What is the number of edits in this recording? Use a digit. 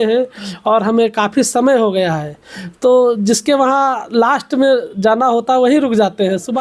0